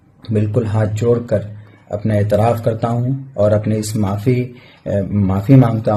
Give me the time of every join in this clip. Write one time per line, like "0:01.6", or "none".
none